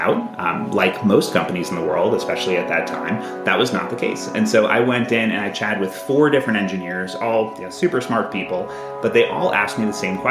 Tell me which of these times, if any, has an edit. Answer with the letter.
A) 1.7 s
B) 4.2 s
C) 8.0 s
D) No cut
D